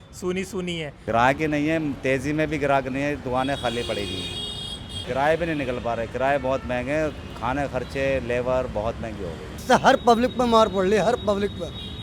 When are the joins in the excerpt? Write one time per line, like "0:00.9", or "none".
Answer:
0:00.9
0:04.9
0:09.6

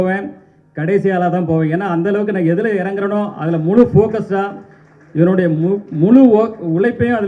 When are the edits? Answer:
none

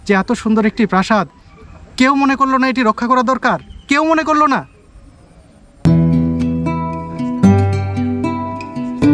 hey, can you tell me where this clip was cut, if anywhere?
none

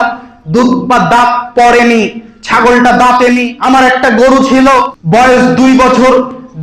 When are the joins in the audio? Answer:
0:03.5
0:05.0

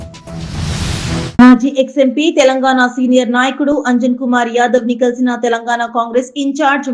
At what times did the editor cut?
0:01.3

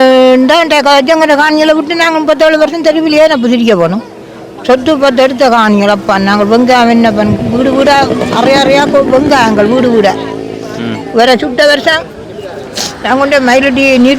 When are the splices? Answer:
none

